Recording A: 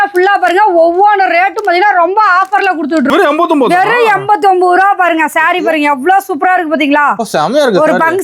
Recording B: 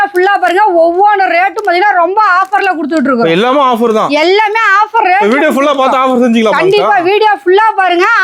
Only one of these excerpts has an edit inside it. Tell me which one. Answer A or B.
A